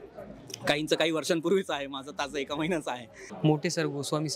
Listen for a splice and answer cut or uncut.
cut